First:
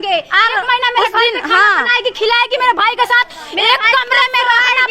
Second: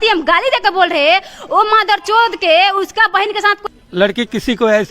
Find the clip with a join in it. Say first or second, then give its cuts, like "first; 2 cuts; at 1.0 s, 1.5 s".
second; 1 cut; at 3.6 s